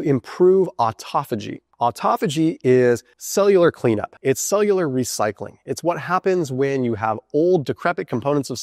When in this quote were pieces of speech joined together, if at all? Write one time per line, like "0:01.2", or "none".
0:03.2
0:04.1